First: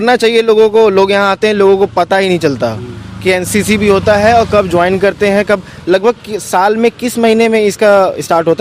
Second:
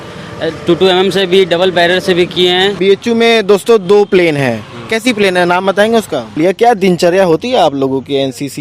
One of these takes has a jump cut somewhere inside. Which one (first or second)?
second